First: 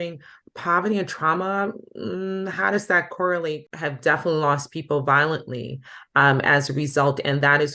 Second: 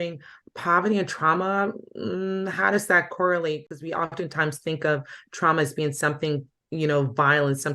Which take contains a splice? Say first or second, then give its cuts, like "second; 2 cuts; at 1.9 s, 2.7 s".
first; 1 cut; at 3.7 s